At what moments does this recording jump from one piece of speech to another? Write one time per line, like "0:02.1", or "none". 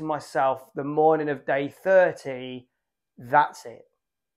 none